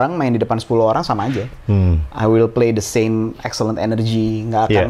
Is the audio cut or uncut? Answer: uncut